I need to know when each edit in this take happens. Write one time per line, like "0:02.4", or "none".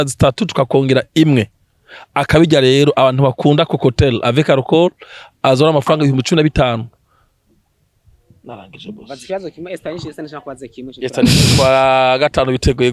none